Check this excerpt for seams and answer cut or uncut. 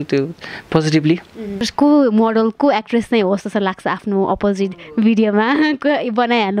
cut